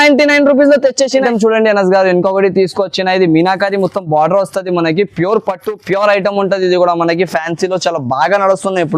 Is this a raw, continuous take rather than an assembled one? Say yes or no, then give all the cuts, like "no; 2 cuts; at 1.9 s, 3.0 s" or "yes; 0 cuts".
no; 1 cut; at 1.1 s